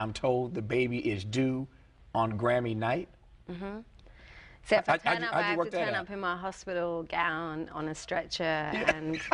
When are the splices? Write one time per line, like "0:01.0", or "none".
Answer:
none